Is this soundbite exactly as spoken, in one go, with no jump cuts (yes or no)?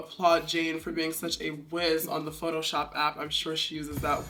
yes